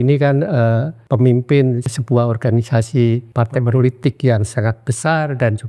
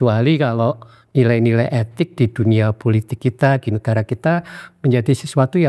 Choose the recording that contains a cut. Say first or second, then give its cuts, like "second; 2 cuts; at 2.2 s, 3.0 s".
first; 3 cuts; at 0.9 s, 1.9 s, 3.3 s